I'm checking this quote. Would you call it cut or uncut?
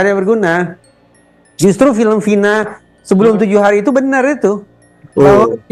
uncut